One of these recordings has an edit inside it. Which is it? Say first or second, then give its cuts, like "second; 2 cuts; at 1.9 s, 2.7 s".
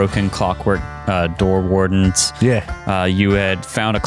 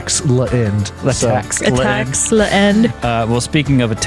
second; 2 cuts; at 0.9 s, 3.0 s